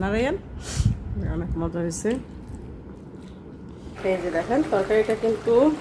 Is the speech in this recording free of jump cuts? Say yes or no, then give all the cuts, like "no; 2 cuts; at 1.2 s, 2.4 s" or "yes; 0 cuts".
no; 1 cut; at 3.9 s